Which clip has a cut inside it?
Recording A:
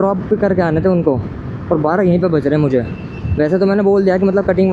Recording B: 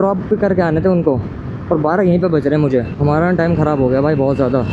B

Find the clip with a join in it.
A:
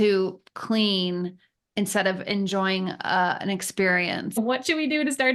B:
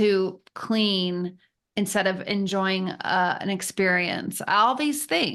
A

